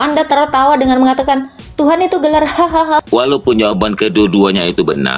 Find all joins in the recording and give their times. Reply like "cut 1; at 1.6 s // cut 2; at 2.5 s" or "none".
cut 1; at 3.0 s